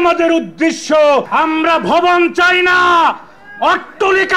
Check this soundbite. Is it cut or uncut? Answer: cut